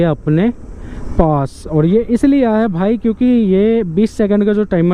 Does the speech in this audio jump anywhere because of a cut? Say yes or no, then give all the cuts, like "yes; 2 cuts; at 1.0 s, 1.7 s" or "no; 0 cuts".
no; 0 cuts